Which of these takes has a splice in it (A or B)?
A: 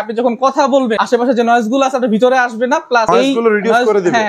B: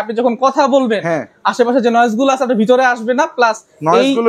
A